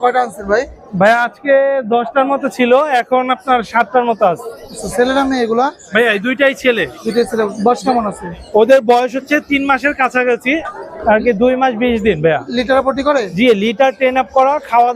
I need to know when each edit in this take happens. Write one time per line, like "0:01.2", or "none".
none